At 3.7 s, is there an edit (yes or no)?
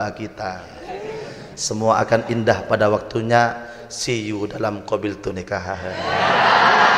no